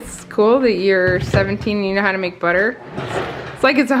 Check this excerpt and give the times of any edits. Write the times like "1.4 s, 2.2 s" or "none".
none